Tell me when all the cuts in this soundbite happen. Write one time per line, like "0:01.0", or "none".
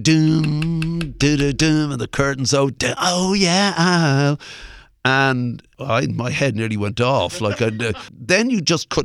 0:05.7
0:07.9